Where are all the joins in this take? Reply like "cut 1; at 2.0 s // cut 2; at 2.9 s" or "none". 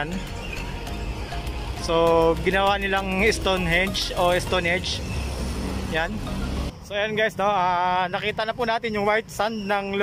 cut 1; at 6.7 s